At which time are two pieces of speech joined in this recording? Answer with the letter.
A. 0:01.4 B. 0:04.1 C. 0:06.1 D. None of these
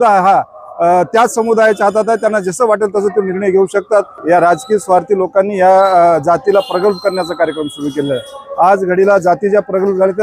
B